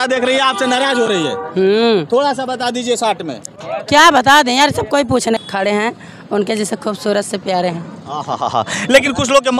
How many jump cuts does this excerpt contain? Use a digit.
1